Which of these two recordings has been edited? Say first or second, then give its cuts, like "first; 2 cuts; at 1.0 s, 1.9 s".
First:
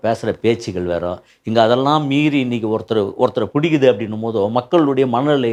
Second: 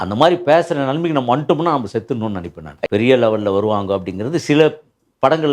second; 1 cut; at 2.8 s